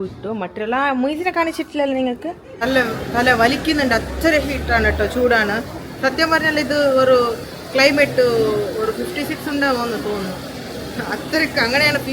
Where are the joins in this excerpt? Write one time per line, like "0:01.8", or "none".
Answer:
0:02.6